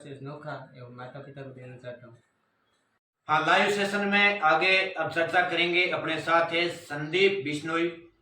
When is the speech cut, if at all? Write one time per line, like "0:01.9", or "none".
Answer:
none